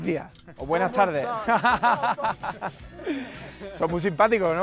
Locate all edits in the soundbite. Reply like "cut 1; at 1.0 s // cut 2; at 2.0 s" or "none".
none